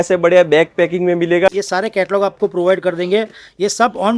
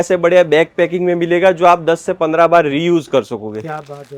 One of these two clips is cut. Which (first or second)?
first